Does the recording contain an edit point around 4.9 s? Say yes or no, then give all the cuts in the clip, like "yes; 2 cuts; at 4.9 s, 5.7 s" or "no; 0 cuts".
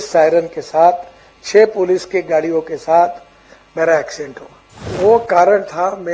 yes; 1 cut; at 4.9 s